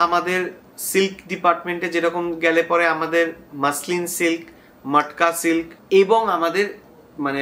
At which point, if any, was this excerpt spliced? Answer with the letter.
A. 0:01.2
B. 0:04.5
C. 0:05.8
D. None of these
C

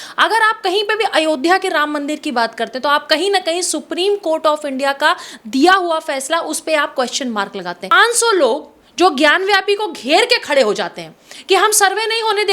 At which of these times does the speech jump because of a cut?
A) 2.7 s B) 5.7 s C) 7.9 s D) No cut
C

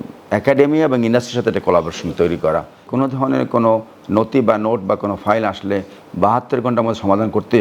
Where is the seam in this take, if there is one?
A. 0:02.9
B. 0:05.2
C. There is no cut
A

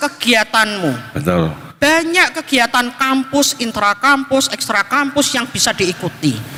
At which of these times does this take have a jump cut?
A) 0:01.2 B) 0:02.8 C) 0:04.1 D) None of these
D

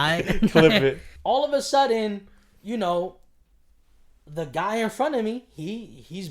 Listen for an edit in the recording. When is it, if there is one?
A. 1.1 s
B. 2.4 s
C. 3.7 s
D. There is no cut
A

